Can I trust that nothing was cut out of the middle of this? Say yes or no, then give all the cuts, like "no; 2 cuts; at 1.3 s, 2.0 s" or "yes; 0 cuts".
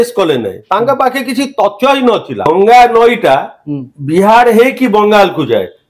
no; 1 cut; at 2.4 s